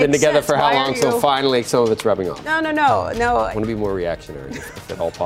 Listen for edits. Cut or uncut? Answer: cut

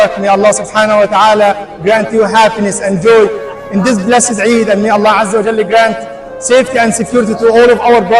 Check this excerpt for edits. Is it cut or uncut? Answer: uncut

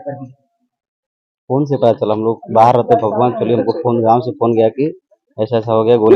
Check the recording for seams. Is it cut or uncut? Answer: uncut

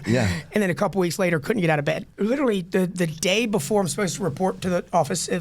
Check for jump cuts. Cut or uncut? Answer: cut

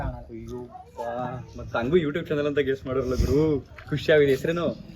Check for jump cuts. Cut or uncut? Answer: uncut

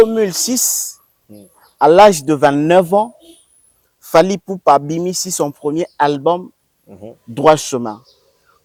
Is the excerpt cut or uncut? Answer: uncut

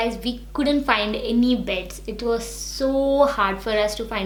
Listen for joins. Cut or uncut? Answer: uncut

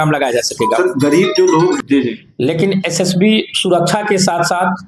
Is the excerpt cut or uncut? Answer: cut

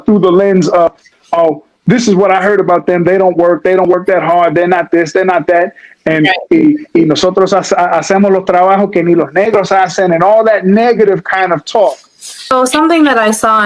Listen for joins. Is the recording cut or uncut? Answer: cut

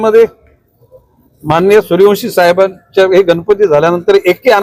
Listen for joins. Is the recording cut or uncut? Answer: uncut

